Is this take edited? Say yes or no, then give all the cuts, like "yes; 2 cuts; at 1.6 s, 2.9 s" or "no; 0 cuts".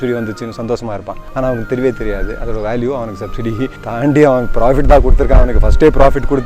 yes; 2 cuts; at 1.2 s, 3.8 s